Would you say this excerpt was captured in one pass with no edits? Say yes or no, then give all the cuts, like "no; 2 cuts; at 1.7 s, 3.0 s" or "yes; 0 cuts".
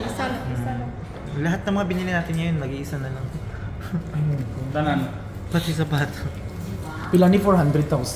yes; 0 cuts